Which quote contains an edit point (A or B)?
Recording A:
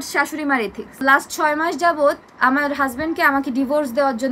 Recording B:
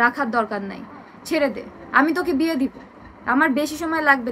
A